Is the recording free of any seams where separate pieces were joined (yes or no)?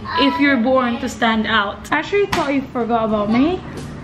no